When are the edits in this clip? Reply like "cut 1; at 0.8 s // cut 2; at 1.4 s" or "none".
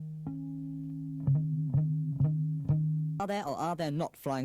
cut 1; at 3.2 s